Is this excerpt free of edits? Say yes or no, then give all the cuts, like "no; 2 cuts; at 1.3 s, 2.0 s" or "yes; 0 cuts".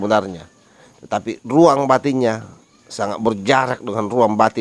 yes; 0 cuts